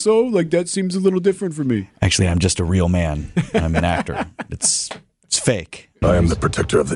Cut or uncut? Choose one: cut